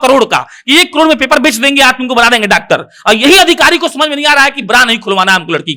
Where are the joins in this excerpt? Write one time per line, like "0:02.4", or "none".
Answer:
none